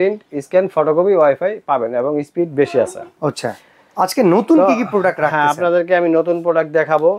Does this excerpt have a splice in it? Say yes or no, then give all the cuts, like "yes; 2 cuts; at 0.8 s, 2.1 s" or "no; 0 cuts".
no; 0 cuts